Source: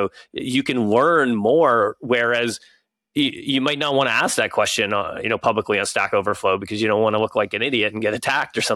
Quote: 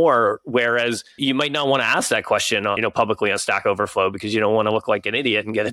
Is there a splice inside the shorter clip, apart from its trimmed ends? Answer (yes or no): yes